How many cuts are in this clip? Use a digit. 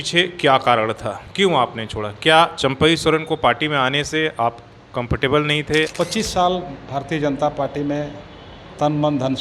1